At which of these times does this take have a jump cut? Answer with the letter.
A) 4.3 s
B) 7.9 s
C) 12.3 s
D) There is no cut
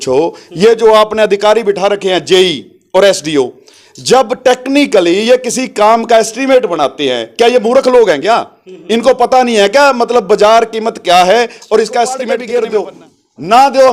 C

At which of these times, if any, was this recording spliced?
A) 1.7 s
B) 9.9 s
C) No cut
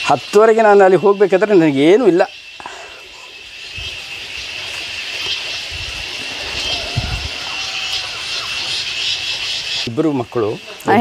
B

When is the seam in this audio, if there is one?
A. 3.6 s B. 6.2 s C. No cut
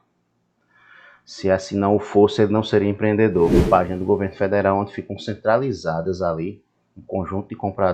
A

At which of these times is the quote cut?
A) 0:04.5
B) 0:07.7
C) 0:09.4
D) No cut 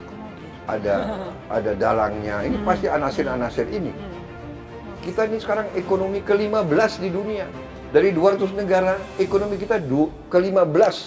A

